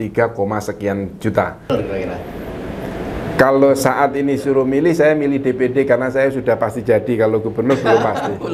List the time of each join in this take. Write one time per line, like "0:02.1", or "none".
0:01.7